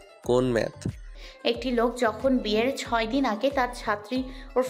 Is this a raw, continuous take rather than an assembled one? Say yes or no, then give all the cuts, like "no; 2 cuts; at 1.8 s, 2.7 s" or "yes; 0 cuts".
no; 1 cut; at 1.1 s